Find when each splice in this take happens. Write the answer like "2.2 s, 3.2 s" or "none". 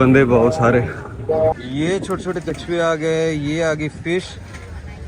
1.6 s